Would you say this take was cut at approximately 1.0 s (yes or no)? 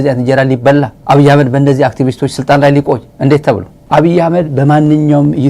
yes